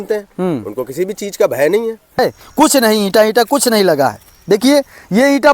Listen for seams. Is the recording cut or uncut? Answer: cut